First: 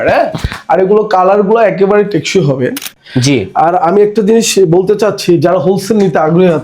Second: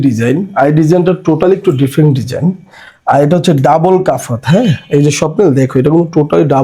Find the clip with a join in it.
first; 1 cut; at 3.0 s

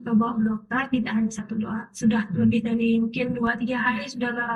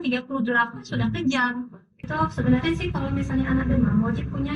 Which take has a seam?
second; 1 cut; at 2.1 s

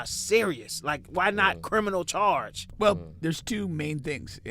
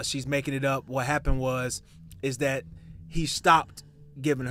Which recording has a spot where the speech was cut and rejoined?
first; 1 cut; at 2.6 s

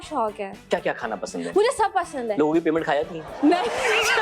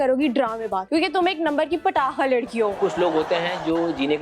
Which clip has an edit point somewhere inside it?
second; 2 cuts; at 0.8 s, 2.8 s

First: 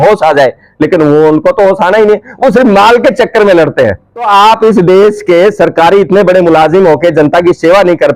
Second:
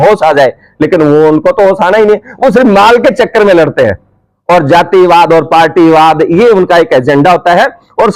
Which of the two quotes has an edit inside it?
first; 1 cut; at 4.3 s

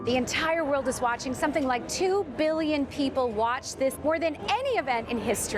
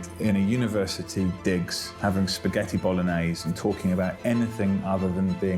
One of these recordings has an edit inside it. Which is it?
first; 1 cut; at 4.3 s

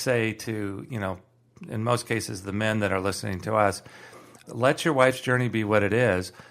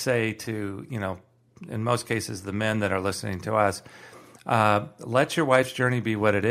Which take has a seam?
first; 1 cut; at 4.4 s

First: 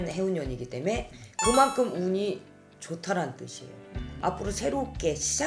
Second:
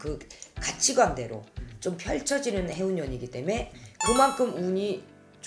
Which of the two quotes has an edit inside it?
first; 1 cut; at 4.0 s

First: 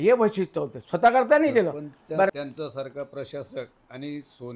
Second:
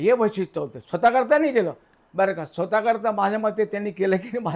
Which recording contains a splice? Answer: first; 1 cut; at 2.3 s

